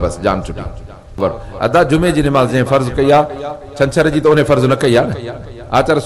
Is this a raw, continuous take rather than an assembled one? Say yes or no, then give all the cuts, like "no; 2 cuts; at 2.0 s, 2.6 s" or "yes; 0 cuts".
no; 1 cut; at 1.1 s